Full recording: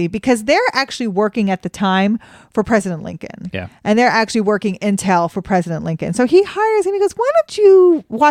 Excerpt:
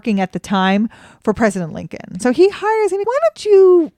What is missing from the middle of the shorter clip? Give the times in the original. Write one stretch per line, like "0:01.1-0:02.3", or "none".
0:03.4-0:06.0
0:06.9-0:07.1